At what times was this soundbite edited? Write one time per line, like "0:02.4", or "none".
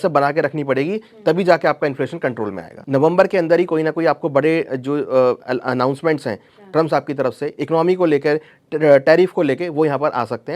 0:02.7